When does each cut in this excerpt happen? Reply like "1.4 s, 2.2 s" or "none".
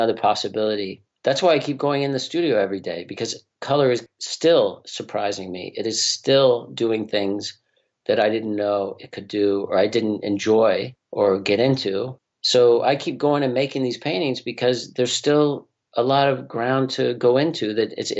none